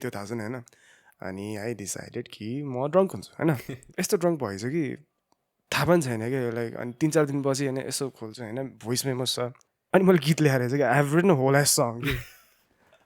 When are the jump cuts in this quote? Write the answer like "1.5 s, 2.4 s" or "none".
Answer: 3.8 s, 9.7 s